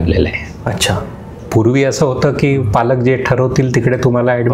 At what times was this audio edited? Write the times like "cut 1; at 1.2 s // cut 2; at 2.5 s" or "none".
none